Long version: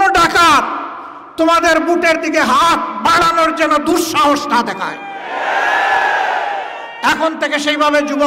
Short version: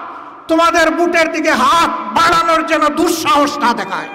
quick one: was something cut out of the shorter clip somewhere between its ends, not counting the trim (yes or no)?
no